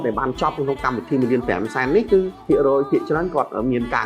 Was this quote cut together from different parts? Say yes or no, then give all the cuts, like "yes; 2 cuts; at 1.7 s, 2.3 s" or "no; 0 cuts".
yes; 1 cut; at 2.4 s